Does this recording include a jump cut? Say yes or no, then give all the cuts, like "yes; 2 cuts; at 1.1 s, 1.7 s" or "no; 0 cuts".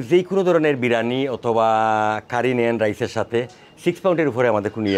no; 0 cuts